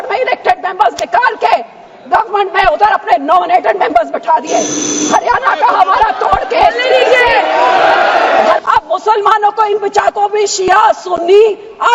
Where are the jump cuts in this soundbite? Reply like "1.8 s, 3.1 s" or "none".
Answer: 8.6 s